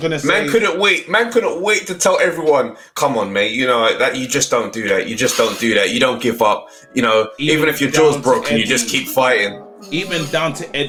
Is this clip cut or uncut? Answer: uncut